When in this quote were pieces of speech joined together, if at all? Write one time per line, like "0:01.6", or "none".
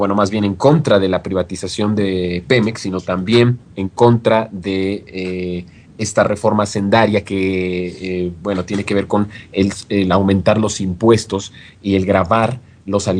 0:08.8